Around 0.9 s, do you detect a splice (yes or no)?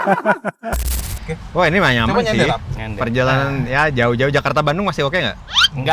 yes